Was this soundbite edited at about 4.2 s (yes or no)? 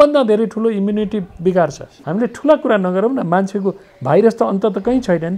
no